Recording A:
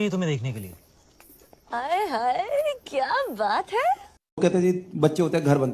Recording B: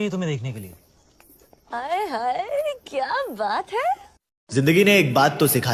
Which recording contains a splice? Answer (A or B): A